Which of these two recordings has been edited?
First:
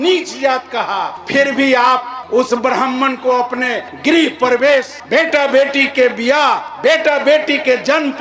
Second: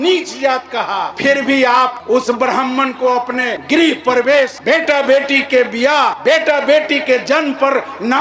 second; 5 cuts; at 1.1 s, 2.0 s, 3.6 s, 4.6 s, 6.2 s

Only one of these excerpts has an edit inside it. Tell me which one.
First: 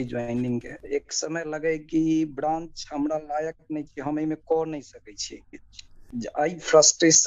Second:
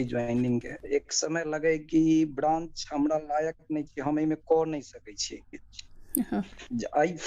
first; 1 cut; at 6.0 s

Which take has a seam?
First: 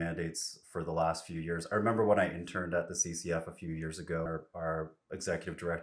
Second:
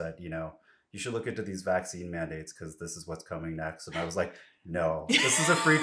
first; 1 cut; at 4.3 s

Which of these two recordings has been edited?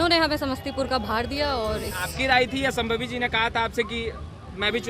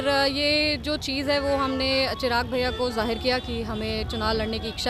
first; 1 cut; at 2.0 s

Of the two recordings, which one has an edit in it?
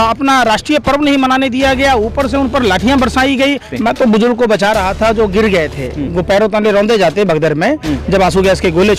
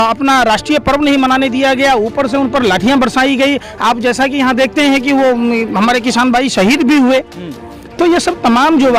first; 1 cut; at 3.7 s

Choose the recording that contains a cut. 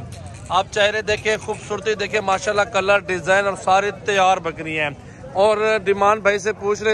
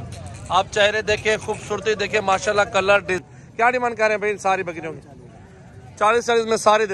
second; 1 cut; at 3.2 s

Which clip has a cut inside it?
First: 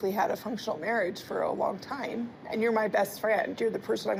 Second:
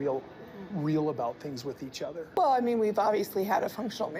second; 1 cut; at 2.2 s

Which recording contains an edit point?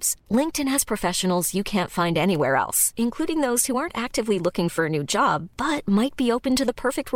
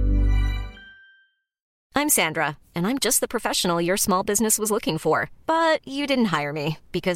second; 1 cut; at 1.6 s

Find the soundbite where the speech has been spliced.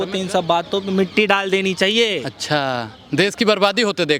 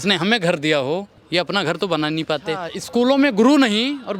second; 2 cuts; at 1.2 s, 2.7 s

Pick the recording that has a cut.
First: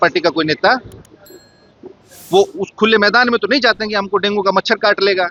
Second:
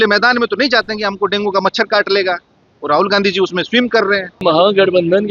second; 1 cut; at 4.4 s

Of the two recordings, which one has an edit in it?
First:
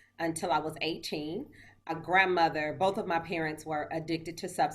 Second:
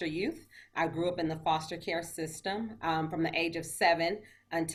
first; 1 cut; at 1.9 s

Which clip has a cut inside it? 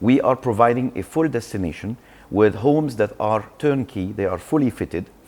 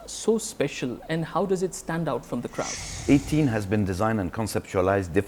second; 1 cut; at 2.9 s

